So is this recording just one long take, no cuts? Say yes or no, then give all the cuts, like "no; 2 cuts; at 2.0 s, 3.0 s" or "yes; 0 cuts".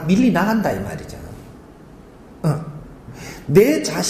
yes; 0 cuts